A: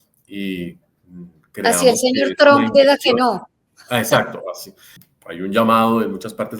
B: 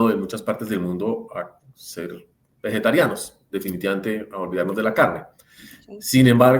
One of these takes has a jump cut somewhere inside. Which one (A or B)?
A